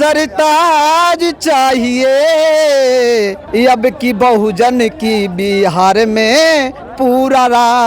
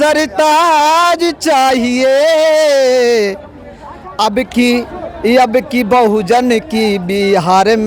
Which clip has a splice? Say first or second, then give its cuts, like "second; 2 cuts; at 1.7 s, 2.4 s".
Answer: first; 1 cut; at 3.4 s